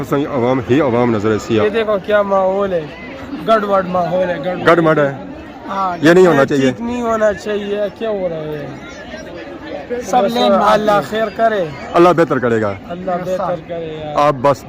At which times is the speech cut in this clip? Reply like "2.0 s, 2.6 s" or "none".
1.6 s